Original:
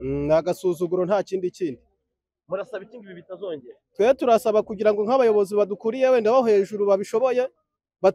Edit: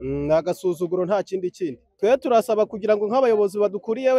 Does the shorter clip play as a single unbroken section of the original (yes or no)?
no